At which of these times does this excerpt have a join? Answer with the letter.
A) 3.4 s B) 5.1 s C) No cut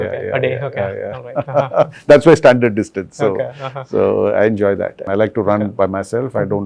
B